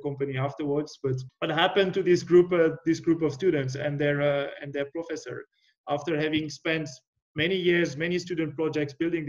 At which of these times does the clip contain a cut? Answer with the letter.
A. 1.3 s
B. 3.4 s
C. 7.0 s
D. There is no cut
A